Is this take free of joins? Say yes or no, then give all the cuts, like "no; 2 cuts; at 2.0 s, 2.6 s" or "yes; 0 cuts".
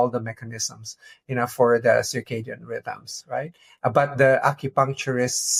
yes; 0 cuts